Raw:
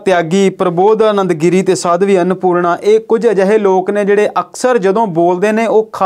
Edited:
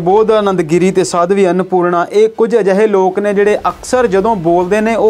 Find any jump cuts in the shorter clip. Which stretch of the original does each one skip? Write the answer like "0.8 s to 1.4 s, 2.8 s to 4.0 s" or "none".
none